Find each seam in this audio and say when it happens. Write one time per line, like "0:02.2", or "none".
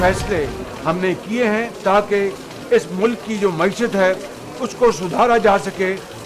0:01.8